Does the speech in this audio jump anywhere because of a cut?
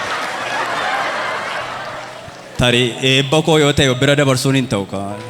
no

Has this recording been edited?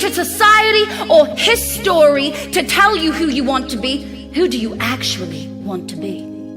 yes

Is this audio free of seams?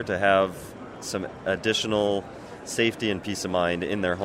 yes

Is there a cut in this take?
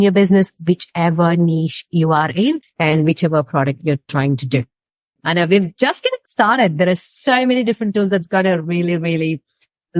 yes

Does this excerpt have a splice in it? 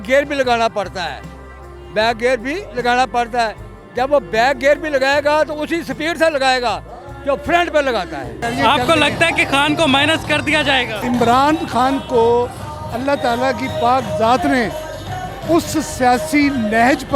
no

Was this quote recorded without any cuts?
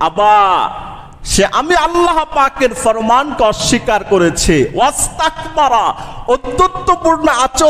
yes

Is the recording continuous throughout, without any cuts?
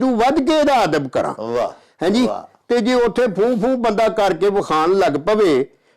yes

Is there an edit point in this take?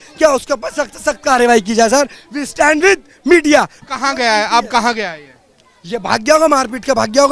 yes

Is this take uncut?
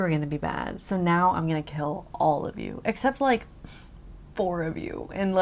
yes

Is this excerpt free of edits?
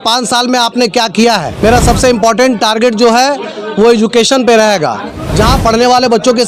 no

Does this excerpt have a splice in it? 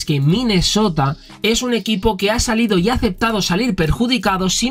no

